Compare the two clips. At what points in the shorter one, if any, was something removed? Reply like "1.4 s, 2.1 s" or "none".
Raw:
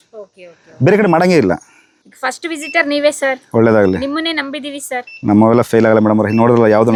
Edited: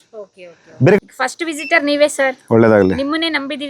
1.0 s